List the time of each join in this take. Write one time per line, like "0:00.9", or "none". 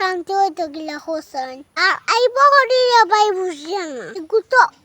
0:01.7

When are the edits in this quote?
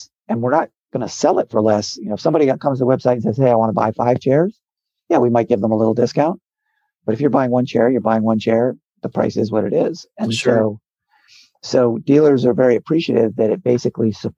none

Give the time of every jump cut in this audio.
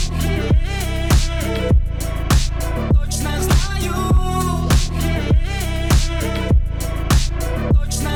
none

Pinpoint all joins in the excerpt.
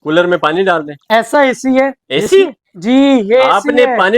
0:00.9

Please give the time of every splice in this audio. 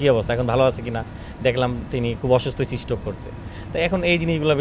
none

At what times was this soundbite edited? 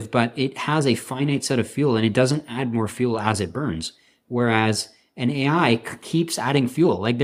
none

